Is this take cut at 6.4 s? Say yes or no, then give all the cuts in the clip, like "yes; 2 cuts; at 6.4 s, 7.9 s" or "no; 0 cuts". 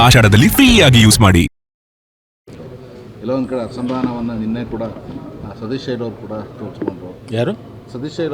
no; 1 cut; at 2.5 s